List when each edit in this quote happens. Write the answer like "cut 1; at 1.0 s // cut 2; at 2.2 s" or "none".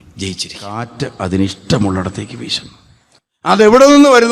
cut 1; at 1.0 s